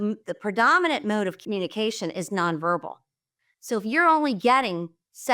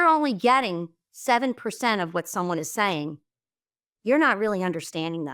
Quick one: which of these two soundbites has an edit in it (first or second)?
first